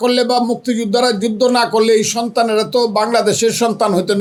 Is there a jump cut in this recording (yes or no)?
no